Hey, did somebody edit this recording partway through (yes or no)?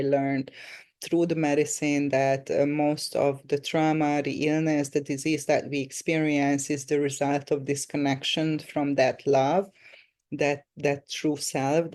no